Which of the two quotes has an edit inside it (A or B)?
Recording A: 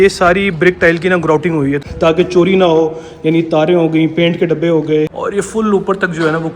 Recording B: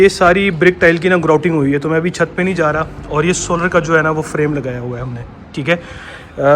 A